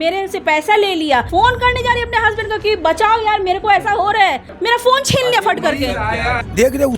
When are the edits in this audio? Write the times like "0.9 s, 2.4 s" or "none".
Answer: 1.3 s, 4.5 s, 6.1 s